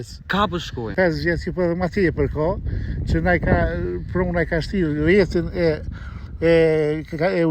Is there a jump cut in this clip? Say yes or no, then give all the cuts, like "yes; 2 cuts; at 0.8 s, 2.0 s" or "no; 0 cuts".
yes; 1 cut; at 0.9 s